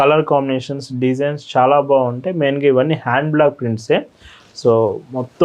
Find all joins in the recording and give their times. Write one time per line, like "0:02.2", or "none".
none